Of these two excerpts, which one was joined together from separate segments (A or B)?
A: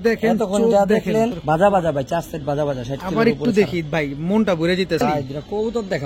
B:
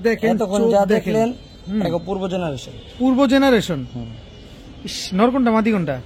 A